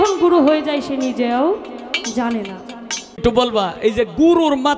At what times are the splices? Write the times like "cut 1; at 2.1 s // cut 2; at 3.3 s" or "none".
cut 1; at 3.2 s